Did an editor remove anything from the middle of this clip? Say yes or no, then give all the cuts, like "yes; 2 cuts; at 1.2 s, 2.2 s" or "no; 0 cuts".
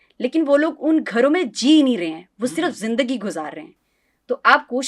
no; 0 cuts